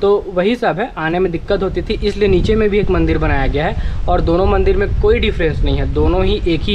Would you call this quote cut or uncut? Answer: uncut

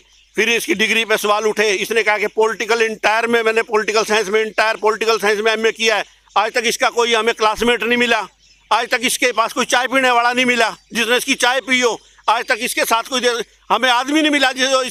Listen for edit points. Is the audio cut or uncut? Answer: uncut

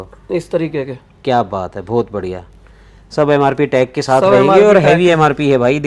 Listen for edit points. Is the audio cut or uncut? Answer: uncut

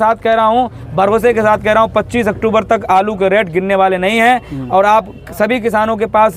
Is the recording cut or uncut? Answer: uncut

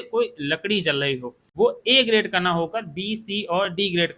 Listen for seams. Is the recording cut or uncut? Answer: cut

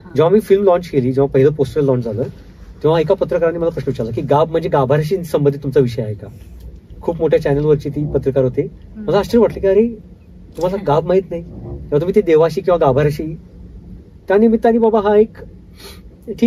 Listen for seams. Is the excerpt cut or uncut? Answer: uncut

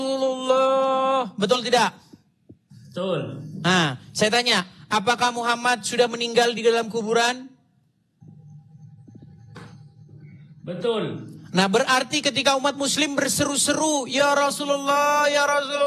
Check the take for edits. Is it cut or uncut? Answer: uncut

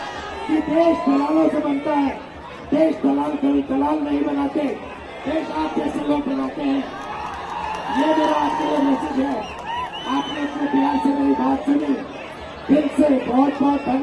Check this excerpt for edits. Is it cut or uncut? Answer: uncut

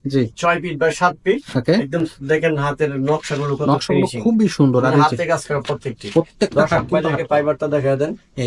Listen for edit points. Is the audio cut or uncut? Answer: uncut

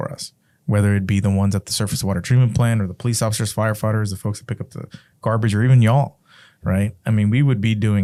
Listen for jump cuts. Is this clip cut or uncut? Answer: uncut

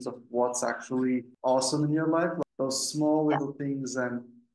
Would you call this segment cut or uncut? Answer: cut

